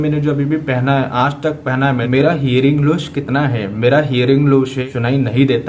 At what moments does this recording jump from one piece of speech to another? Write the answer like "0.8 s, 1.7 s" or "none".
2.0 s, 4.8 s